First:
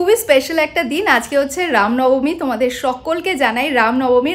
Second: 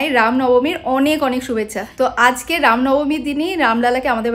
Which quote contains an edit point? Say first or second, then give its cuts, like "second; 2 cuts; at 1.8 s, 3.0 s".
second; 1 cut; at 1.8 s